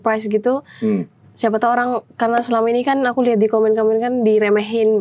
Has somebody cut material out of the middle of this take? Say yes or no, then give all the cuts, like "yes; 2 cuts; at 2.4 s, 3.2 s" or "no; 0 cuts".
no; 0 cuts